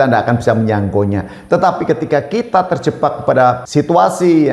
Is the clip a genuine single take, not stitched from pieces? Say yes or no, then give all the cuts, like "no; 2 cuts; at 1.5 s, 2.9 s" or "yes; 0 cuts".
no; 1 cut; at 3.6 s